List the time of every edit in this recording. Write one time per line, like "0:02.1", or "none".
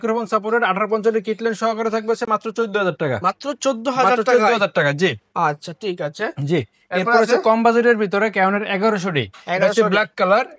none